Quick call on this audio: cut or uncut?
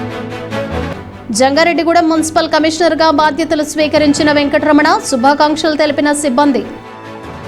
cut